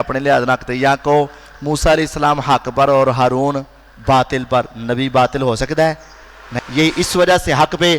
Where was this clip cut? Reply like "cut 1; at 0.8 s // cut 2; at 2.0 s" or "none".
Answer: cut 1; at 6.5 s